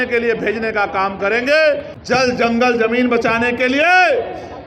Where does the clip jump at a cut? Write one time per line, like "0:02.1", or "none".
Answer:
0:01.9